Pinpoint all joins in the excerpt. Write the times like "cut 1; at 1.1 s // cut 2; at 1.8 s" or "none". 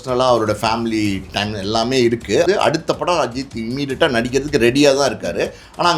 cut 1; at 2.4 s